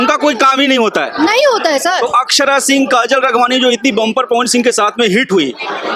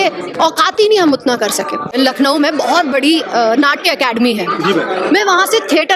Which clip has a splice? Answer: second; 1 cut; at 1.8 s

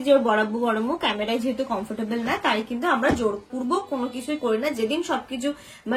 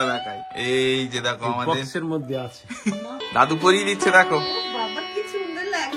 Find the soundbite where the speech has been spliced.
second; 1 cut; at 3.1 s

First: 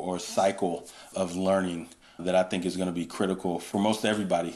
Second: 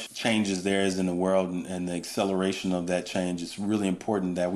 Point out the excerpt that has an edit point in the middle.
first; 2 cuts; at 1.0 s, 3.6 s

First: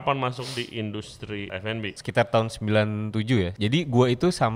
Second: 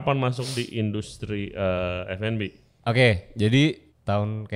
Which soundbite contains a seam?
first; 2 cuts; at 1.6 s, 3.5 s

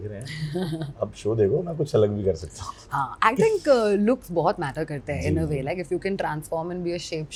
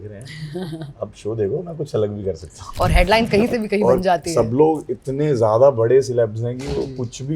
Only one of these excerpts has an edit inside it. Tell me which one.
second; 1 cut; at 2.7 s

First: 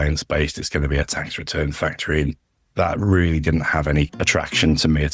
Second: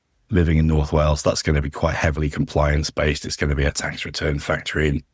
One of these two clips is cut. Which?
first; 1 cut; at 4.1 s

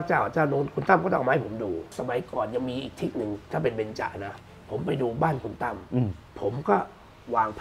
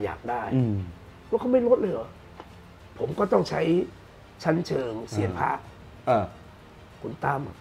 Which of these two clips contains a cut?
first; 3 cuts; at 1.9 s, 4.3 s, 6.2 s

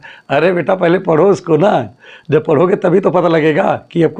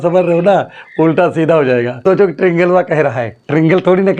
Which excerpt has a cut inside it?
second; 1 cut; at 2.0 s

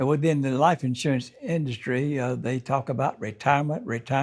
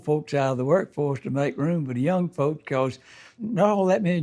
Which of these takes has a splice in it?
second; 1 cut; at 3.0 s

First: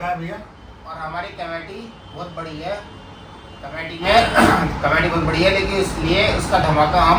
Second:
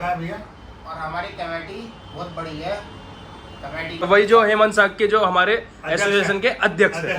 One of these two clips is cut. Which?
second; 1 cut; at 4.0 s

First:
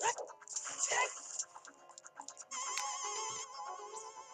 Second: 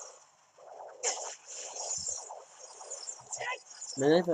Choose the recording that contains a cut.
first; 1 cut; at 1.5 s

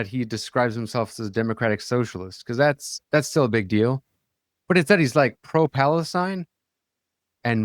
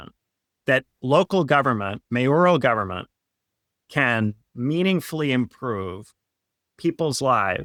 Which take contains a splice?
first; 1 cut; at 2.9 s

